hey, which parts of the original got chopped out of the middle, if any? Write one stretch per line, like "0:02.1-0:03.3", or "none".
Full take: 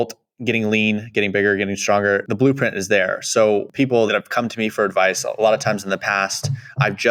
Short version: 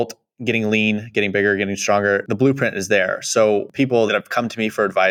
none